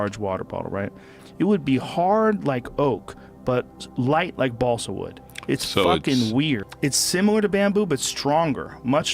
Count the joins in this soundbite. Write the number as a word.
two